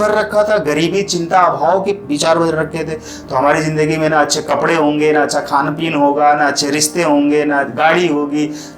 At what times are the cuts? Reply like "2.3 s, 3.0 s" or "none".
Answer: none